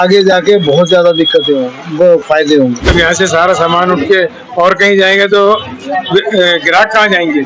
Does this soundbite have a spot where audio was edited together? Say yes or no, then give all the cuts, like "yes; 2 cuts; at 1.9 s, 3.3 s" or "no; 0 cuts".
yes; 1 cut; at 2.9 s